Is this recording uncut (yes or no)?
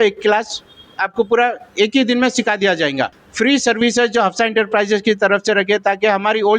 no